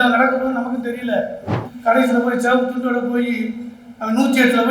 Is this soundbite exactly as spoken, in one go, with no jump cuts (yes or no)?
no